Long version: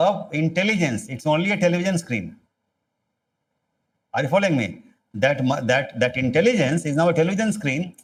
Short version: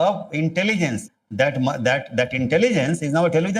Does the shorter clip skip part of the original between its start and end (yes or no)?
yes